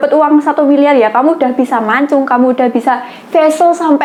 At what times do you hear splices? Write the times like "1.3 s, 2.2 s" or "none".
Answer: none